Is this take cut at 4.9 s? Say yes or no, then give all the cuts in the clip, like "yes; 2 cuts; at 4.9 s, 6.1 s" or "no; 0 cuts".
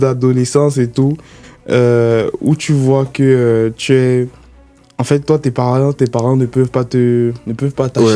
no; 0 cuts